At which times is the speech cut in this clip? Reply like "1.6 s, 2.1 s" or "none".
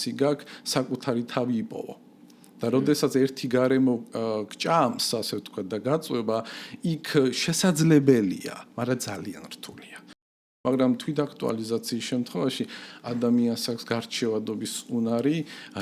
10.3 s